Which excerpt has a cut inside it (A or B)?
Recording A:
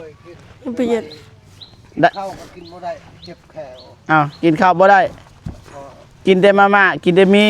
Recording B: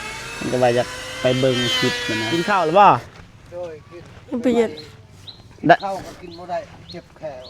B